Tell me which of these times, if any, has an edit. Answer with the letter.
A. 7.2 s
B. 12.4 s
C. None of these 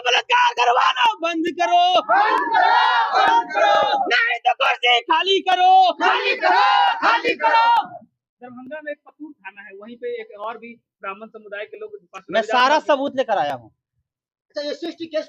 C